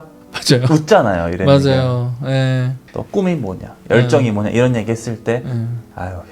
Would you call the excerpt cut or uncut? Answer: uncut